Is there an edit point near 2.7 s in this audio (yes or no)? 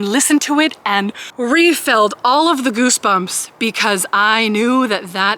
no